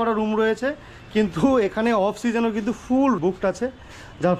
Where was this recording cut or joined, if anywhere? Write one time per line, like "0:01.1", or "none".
0:03.2